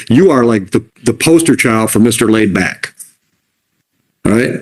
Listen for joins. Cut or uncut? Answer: uncut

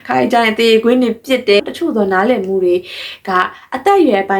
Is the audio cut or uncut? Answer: cut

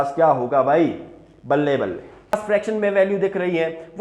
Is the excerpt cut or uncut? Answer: cut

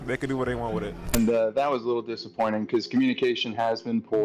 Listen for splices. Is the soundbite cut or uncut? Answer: cut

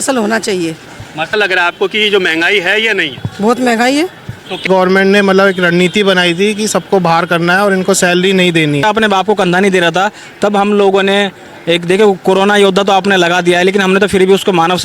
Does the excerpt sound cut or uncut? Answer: cut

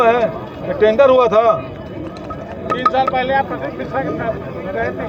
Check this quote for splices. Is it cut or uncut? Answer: uncut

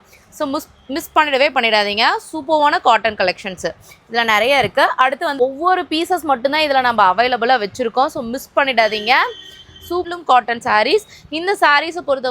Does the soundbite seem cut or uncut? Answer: cut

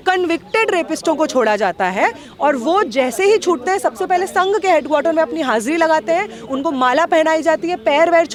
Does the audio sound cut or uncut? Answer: uncut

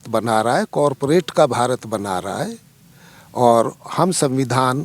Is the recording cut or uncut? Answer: uncut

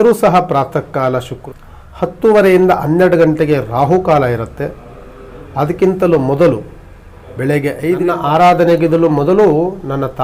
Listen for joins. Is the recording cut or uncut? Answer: cut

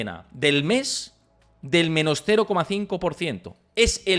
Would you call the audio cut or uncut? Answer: uncut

